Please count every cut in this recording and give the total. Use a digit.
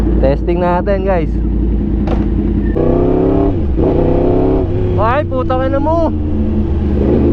1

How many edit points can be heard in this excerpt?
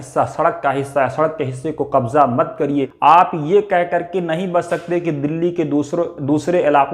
1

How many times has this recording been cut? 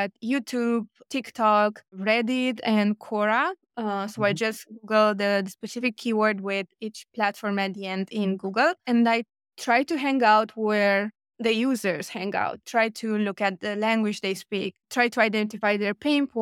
2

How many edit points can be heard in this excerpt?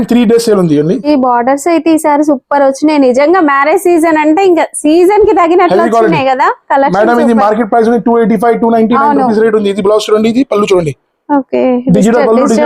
1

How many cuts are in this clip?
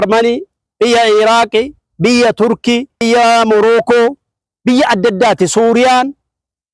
1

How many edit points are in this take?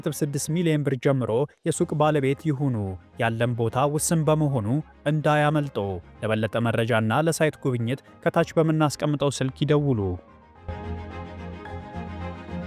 0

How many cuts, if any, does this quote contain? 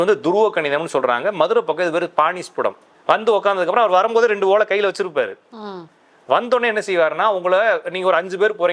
1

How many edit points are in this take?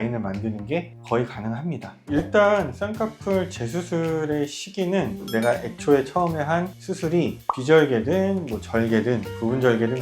1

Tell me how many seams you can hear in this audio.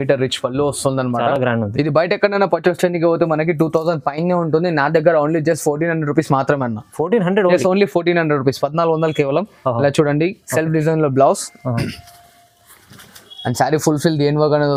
0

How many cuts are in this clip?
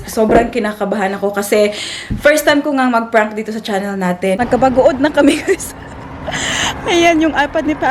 1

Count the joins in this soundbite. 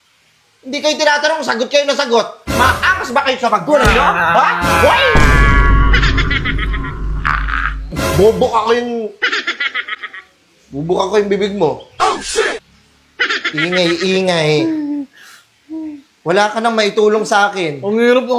0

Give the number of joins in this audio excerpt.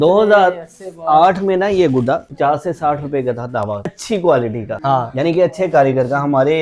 3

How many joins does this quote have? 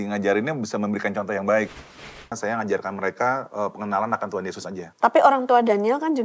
2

